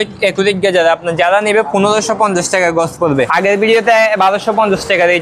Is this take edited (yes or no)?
yes